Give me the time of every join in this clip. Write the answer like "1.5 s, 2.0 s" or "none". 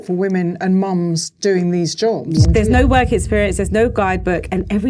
2.5 s